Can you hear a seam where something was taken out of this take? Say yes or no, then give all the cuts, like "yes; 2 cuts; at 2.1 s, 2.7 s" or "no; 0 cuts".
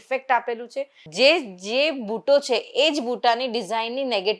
yes; 1 cut; at 1.0 s